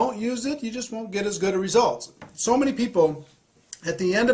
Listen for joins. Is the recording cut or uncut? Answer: cut